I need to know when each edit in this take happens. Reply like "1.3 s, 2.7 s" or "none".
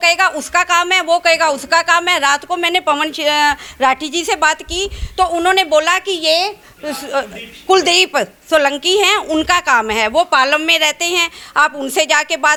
none